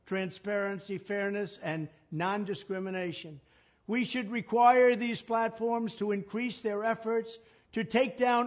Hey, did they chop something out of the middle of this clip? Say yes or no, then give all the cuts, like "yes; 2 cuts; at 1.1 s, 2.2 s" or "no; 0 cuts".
no; 0 cuts